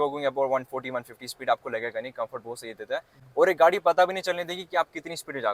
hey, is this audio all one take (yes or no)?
yes